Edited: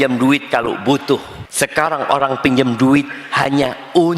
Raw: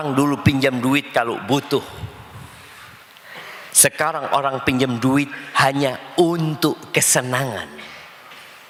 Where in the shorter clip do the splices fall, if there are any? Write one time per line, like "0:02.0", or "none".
0:01.4